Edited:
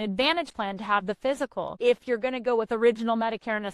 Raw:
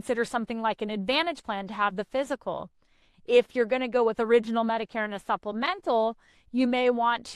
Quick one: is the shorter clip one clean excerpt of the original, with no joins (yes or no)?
no